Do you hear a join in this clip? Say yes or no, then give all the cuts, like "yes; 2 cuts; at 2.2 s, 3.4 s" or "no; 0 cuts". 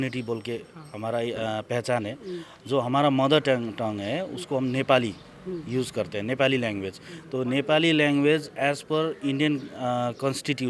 no; 0 cuts